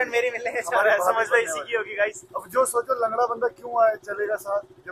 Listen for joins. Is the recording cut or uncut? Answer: cut